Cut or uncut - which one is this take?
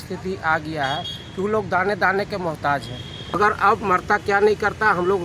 cut